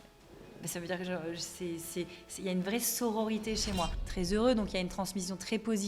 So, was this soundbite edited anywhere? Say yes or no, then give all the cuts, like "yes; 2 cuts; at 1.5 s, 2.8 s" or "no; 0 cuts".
yes; 1 cut; at 3.9 s